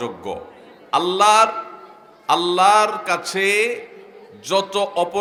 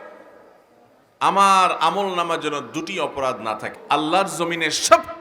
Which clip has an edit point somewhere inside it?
second; 1 cut; at 3.7 s

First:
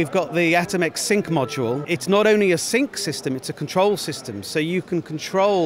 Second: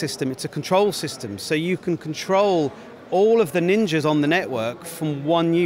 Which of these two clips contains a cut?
first; 1 cut; at 1.8 s

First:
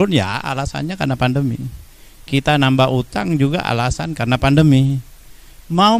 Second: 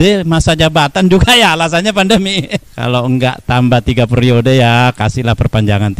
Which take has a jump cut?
second; 1 cut; at 2.6 s

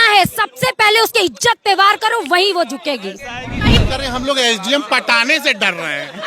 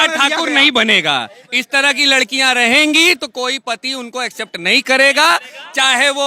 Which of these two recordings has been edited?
first; 1 cut; at 3.8 s

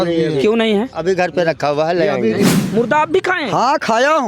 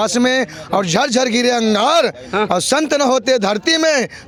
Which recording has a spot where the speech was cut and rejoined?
first; 1 cut; at 2.5 s

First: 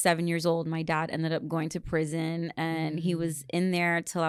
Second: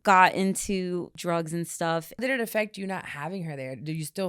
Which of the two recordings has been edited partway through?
second; 2 cuts; at 1.1 s, 2.2 s

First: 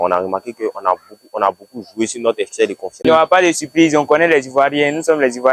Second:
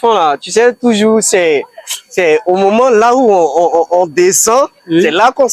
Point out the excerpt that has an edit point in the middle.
first; 1 cut; at 3.0 s

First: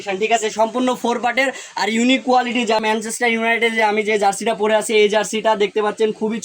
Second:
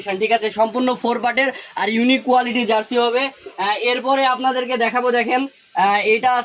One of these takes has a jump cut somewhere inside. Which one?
first; 1 cut; at 2.8 s

